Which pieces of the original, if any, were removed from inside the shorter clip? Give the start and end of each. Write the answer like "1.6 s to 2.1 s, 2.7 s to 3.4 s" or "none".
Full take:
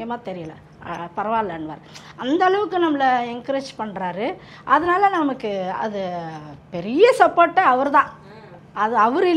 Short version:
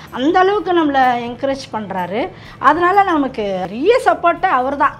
5.7 s to 6.8 s